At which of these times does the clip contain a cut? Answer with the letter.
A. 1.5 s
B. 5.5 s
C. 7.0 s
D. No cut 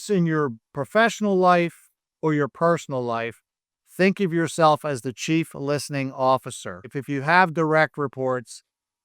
C